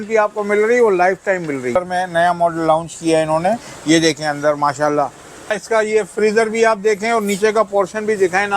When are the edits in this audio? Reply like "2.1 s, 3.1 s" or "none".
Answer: 1.8 s, 5.6 s